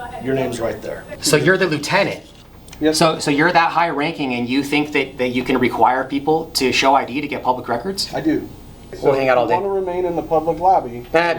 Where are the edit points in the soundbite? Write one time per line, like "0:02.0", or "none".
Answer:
0:01.1
0:09.0